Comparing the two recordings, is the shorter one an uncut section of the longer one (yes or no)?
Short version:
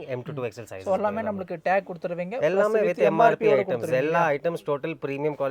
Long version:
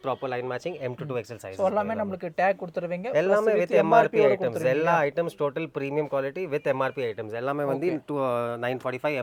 yes